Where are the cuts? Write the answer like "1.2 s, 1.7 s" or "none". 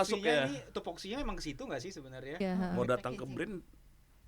2.4 s